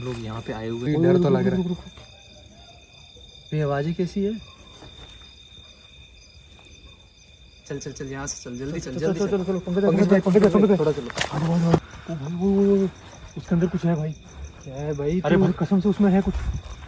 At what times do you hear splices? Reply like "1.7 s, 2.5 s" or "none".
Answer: 0.8 s, 12.0 s